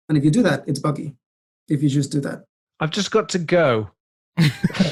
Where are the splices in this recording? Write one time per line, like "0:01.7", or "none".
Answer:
none

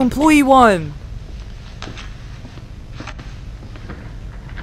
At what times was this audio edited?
none

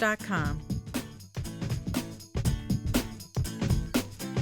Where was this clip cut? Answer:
0:00.7
0:03.2

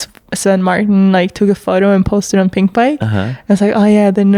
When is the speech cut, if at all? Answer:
none

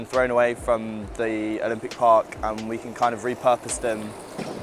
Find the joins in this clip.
none

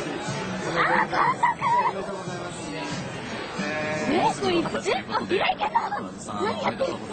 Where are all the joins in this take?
0:04.7

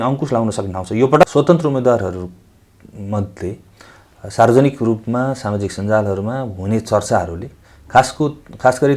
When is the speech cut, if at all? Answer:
0:01.2

